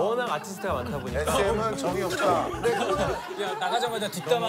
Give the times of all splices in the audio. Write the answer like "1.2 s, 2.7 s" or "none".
none